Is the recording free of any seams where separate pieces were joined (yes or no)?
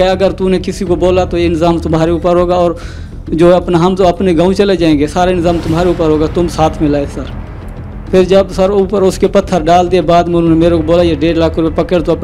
yes